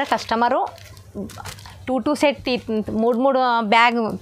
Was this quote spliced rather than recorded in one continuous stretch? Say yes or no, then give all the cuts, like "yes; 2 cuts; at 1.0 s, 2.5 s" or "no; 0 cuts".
no; 0 cuts